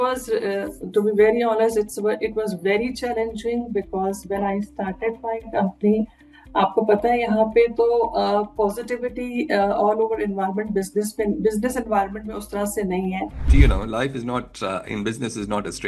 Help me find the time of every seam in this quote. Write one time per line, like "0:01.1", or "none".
0:13.5